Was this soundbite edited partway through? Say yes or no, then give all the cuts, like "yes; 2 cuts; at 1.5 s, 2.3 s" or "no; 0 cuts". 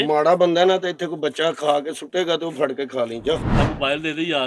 yes; 1 cut; at 3.5 s